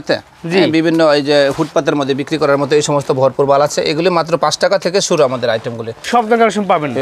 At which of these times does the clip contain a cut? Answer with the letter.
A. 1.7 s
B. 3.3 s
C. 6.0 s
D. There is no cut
C